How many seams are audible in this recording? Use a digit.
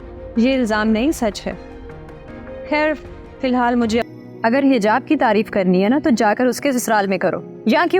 1